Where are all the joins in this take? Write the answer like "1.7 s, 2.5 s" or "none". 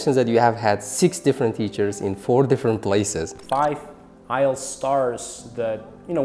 3.3 s